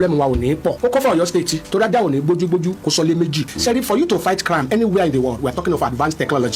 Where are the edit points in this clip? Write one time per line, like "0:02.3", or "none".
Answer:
0:00.8
0:01.6
0:03.5